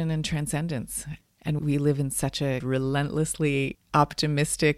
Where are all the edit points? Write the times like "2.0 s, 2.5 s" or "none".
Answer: 1.6 s, 2.6 s